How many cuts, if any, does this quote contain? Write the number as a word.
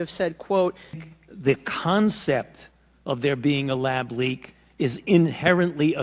one